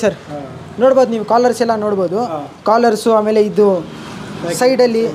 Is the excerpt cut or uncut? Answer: uncut